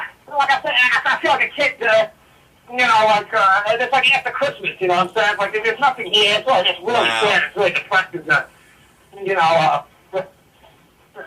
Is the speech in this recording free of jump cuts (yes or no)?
no